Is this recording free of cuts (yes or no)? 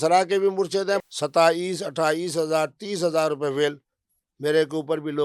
no